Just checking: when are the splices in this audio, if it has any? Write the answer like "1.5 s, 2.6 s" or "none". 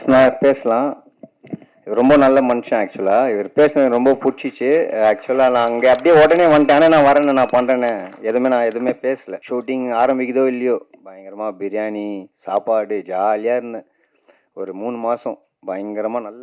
9.3 s